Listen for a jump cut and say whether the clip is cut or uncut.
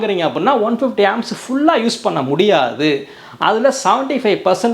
uncut